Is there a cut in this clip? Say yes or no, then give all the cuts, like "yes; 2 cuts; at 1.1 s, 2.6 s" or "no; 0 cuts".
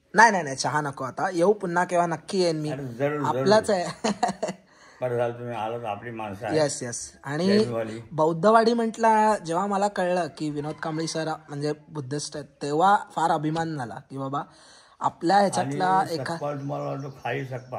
no; 0 cuts